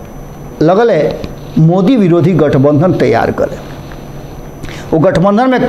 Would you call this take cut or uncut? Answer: uncut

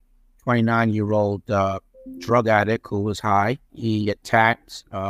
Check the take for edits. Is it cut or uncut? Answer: cut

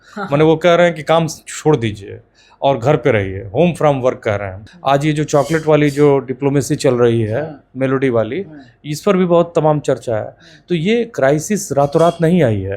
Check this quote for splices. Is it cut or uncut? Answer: cut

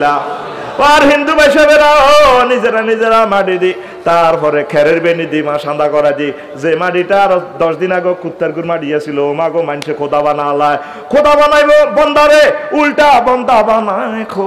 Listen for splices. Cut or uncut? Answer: uncut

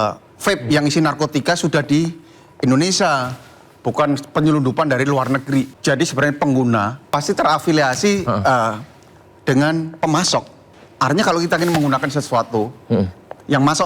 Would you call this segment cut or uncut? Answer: cut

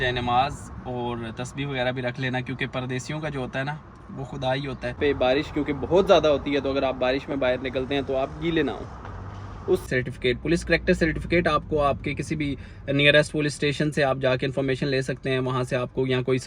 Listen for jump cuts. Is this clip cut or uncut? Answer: cut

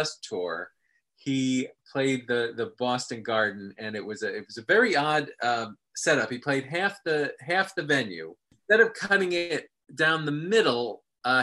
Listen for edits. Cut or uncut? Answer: cut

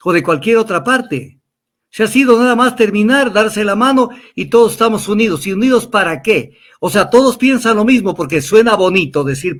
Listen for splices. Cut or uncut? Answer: uncut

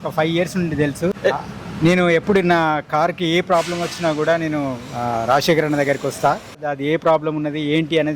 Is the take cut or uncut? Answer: cut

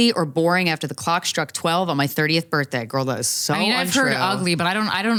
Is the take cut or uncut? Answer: uncut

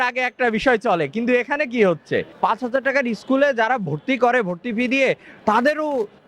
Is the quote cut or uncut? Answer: cut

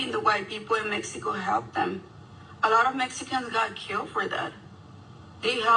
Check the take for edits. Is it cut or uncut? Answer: uncut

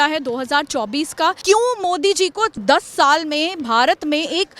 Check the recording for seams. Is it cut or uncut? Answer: cut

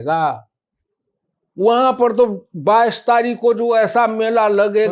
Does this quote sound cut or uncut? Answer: uncut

